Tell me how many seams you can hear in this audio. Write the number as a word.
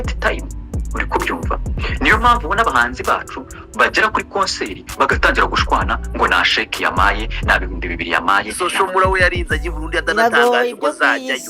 one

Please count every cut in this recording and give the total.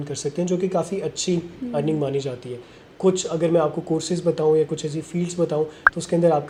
zero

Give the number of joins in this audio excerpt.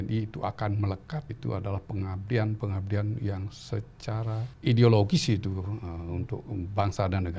two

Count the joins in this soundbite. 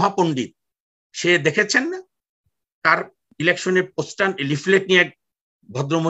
zero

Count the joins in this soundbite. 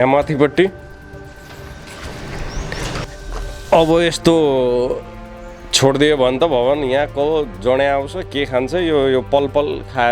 one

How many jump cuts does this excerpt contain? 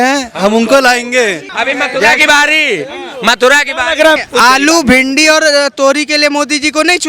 two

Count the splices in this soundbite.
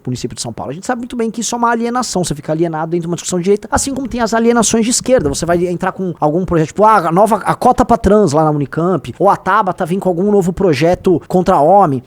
four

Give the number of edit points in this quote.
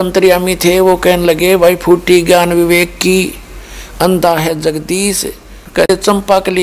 zero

